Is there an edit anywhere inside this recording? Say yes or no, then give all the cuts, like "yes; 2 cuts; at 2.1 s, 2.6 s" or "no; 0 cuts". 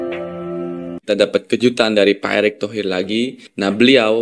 yes; 1 cut; at 1.0 s